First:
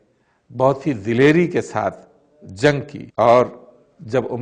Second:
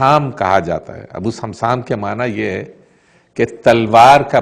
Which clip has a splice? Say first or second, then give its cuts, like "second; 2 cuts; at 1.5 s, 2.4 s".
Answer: first; 1 cut; at 3.0 s